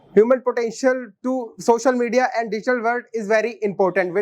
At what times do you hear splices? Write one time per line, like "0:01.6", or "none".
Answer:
none